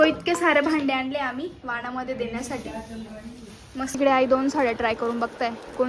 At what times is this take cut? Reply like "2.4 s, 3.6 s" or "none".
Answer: 4.0 s

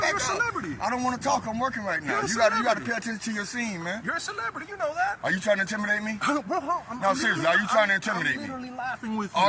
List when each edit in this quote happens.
5.2 s

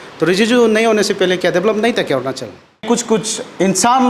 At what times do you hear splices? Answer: 2.8 s

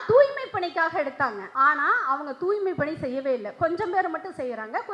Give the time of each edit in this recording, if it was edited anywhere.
1.4 s

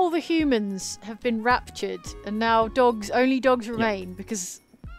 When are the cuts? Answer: none

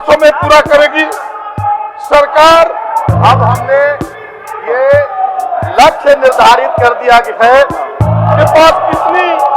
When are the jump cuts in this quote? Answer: 3.1 s, 8.1 s

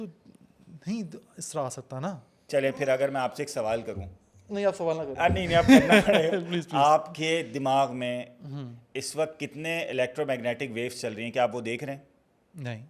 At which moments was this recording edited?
2.3 s

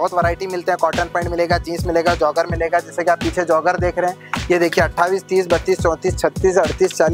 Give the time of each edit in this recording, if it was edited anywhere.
none

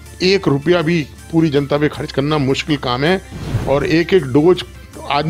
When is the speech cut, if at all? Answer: none

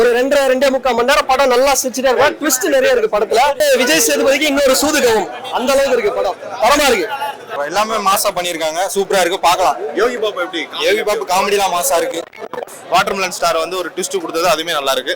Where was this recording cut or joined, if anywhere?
3.6 s, 7.5 s, 12.7 s

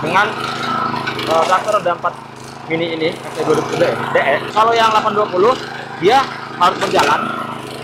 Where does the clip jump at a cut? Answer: 4.5 s

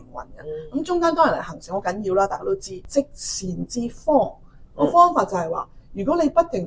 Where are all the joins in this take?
2.8 s

